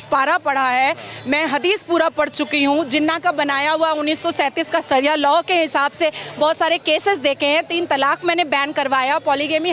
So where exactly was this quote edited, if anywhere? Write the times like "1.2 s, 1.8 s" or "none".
none